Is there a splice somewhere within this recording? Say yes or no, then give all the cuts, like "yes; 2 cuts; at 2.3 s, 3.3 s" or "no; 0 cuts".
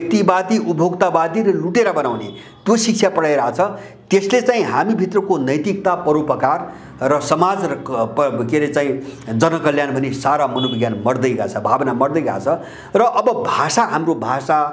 no; 0 cuts